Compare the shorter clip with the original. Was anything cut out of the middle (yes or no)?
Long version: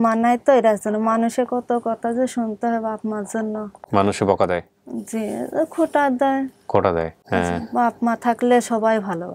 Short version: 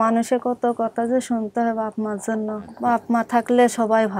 yes